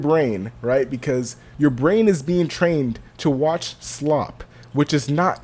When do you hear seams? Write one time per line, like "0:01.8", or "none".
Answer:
0:01.4

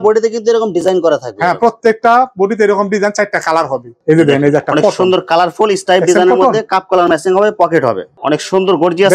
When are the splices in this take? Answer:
0:03.9
0:08.1

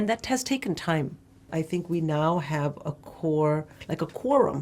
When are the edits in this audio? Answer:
0:01.5

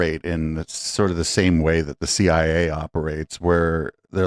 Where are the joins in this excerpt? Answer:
none

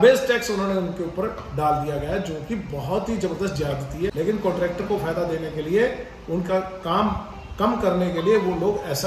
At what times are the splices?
0:04.1

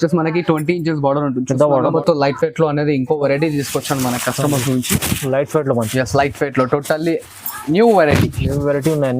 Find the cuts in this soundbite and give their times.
0:01.9

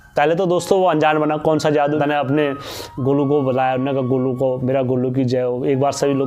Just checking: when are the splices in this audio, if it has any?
0:02.0

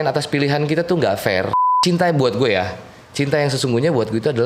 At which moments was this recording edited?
0:01.6

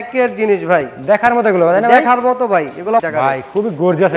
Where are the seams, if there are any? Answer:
0:03.0

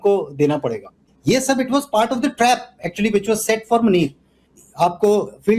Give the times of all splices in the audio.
0:01.0
0:04.6

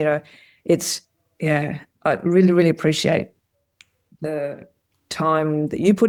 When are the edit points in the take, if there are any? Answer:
none

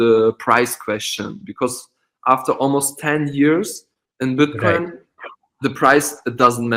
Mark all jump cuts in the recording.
none

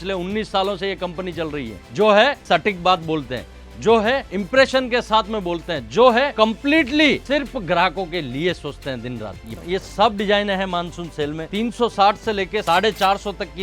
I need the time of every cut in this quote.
0:01.8
0:02.4
0:04.3
0:06.3
0:07.2
0:09.6
0:11.4
0:12.6

